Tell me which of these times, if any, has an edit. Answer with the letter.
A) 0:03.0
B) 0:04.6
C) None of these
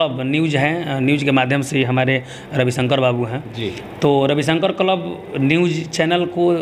C